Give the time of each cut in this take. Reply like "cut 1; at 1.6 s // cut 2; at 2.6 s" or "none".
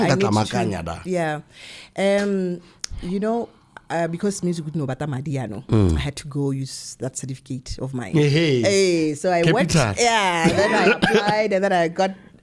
none